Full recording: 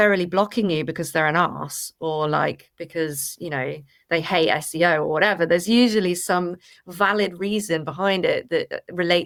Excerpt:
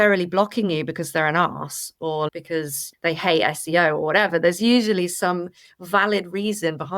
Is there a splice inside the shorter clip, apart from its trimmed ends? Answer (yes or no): yes